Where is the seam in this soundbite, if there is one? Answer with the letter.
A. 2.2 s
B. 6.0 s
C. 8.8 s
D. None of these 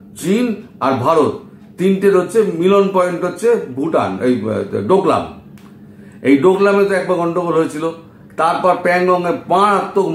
D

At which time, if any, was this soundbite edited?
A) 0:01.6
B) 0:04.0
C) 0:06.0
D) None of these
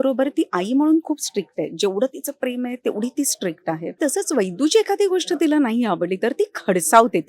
B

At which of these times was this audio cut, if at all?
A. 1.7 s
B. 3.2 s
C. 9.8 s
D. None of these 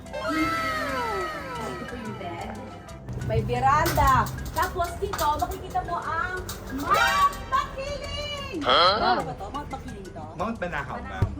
B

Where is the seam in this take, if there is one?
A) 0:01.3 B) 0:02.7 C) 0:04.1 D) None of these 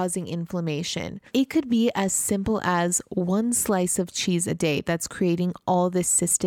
A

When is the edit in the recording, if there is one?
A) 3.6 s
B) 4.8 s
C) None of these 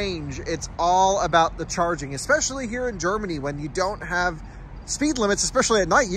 C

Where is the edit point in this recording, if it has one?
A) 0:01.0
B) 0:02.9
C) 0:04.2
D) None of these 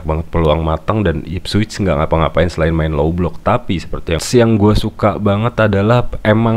C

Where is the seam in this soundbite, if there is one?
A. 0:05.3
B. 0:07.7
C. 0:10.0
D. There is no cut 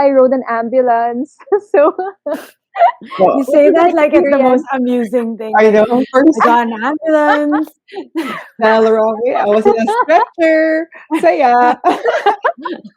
D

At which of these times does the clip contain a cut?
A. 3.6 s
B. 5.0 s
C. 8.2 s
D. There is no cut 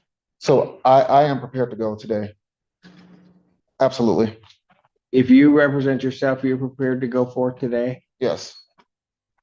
A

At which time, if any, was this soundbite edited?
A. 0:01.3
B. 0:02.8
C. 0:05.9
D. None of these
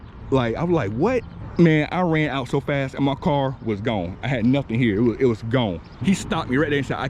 C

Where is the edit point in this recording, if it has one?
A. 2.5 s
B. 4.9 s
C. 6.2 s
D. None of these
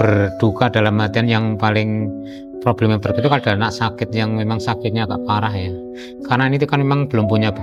D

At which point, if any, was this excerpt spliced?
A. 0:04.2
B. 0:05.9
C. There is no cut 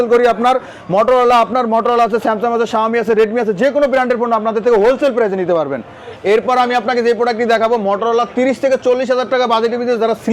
C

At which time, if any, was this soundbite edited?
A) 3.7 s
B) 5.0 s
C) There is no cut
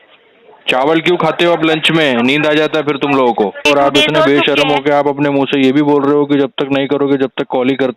A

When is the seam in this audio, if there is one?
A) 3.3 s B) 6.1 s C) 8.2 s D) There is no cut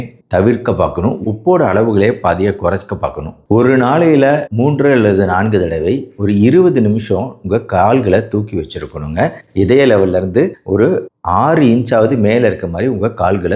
A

